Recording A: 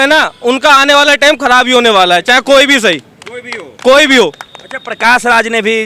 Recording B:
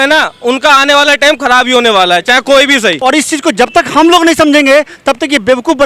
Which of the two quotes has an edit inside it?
B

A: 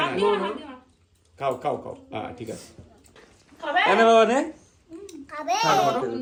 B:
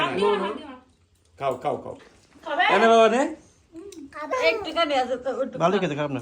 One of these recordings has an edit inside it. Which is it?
B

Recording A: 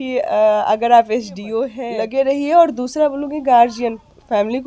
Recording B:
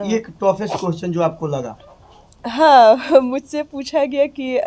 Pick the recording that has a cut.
A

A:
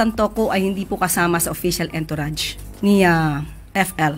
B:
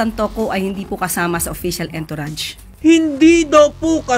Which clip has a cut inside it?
B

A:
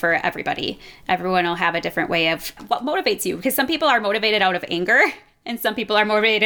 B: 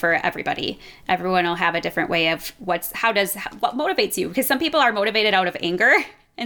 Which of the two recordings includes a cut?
A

